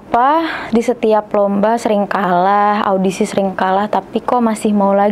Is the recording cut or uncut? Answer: uncut